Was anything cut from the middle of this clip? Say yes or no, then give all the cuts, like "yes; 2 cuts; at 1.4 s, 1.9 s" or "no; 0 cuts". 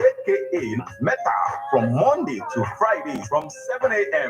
yes; 1 cut; at 1.6 s